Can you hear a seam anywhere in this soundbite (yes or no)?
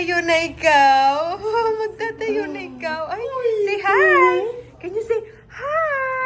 no